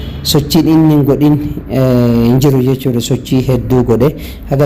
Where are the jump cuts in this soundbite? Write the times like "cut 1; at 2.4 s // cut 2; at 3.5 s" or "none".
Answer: none